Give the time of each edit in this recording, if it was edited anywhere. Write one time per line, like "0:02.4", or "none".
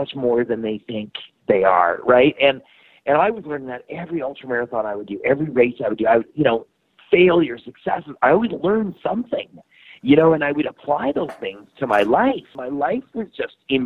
0:12.6